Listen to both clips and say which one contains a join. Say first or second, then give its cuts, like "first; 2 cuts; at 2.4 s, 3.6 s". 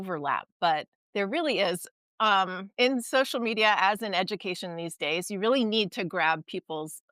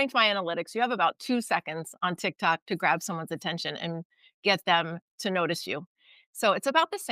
first; 2 cuts; at 1.0 s, 2.6 s